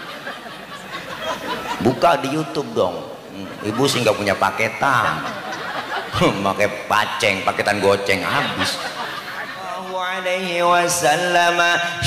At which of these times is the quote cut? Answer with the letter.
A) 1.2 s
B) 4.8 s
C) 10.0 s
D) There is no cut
C